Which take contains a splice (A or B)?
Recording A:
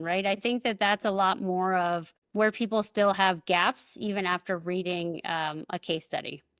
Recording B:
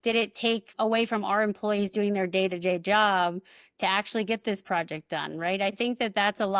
A